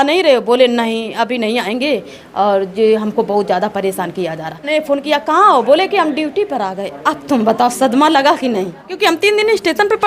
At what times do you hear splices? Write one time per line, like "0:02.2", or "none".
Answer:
0:04.7
0:08.8

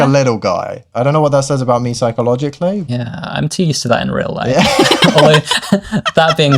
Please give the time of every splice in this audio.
0:00.9
0:02.9

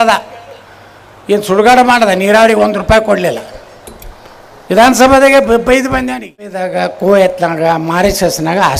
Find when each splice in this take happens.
0:06.7

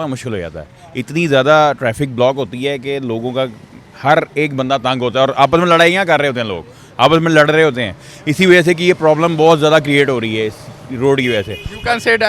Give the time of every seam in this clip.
none

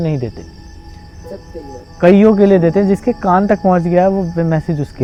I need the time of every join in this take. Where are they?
none

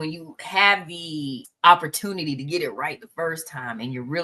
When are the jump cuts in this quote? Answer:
0:01.4

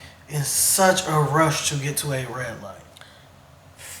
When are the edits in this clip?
none

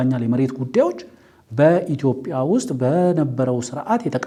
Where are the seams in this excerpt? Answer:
none

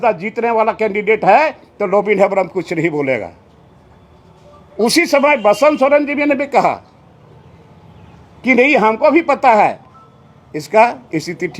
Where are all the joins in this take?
none

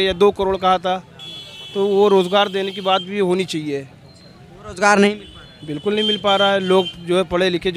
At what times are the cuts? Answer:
none

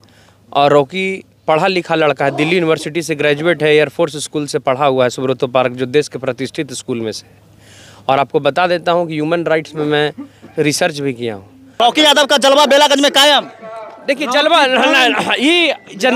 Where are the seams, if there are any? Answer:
0:11.7

